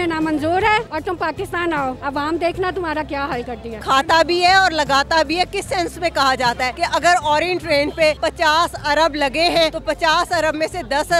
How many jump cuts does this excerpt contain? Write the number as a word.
six